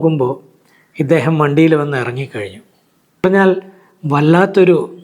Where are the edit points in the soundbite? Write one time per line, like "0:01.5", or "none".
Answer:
0:03.2